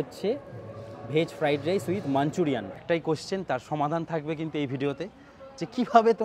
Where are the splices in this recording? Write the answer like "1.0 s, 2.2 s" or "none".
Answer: 2.8 s